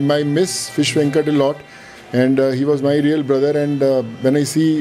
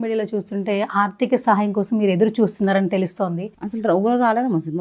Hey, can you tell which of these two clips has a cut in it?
second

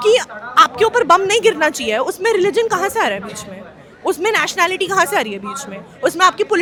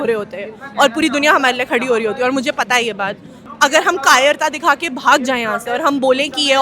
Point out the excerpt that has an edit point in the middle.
second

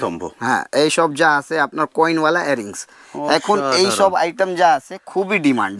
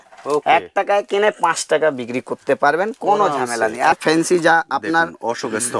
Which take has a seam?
second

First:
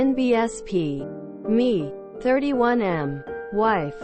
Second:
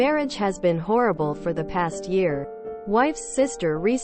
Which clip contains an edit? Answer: first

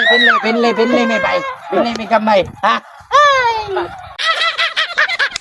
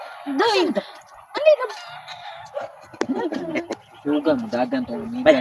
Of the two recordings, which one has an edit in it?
first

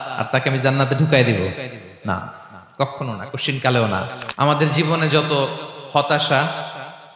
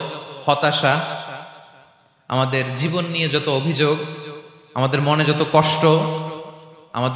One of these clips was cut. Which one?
first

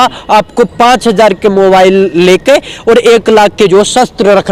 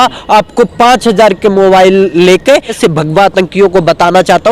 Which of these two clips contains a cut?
second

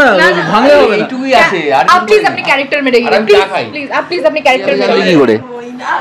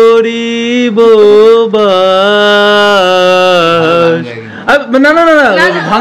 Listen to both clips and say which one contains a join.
first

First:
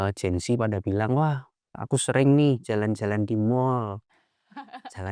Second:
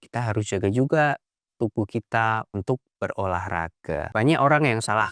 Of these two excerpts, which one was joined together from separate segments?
second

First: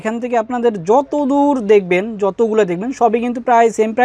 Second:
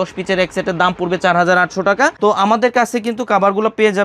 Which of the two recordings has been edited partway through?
second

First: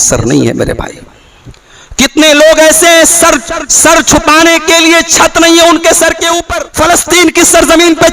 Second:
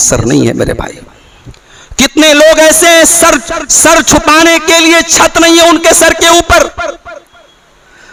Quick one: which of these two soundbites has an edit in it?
first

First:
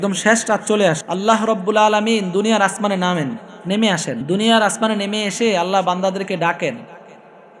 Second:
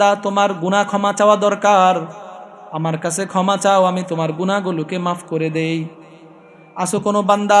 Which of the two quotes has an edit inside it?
first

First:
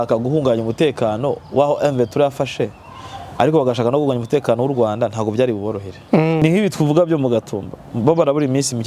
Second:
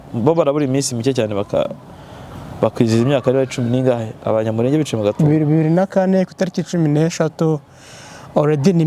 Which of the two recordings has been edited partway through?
first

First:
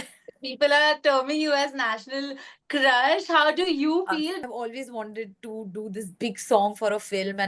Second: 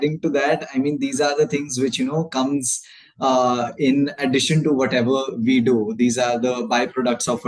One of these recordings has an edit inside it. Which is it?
first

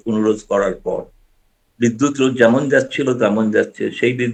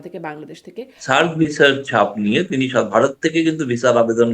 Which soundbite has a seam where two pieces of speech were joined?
second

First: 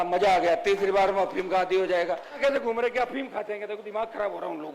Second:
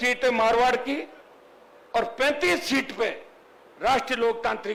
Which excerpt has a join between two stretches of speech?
first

